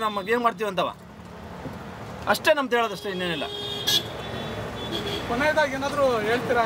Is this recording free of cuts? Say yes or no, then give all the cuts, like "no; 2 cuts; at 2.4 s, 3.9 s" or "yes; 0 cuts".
yes; 0 cuts